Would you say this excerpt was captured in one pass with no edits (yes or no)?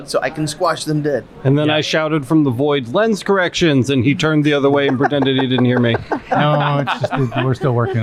yes